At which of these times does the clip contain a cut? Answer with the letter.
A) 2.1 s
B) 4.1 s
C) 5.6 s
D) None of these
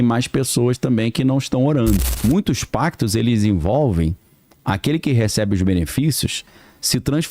A